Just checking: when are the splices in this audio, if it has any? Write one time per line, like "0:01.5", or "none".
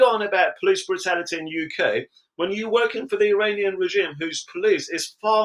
none

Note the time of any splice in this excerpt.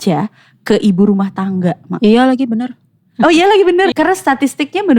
0:03.9

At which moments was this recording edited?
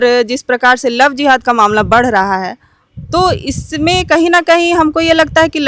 none

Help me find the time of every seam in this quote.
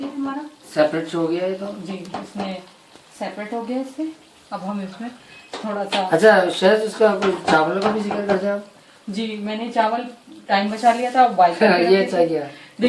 none

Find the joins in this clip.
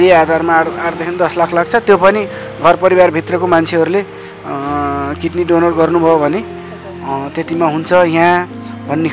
none

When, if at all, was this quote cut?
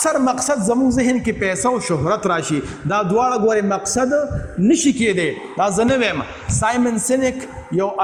none

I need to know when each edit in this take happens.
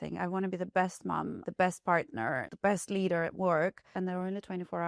0:01.4
0:02.5
0:03.9

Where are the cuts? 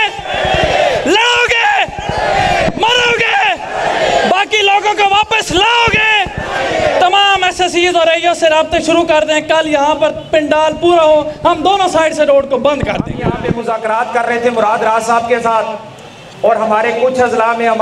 0:13.6

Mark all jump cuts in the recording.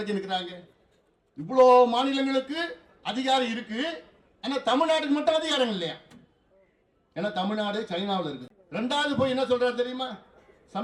none

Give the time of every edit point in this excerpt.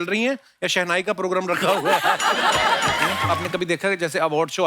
0:03.2

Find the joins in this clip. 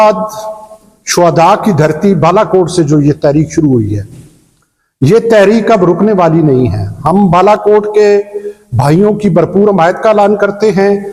none

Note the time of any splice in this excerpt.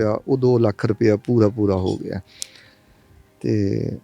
none

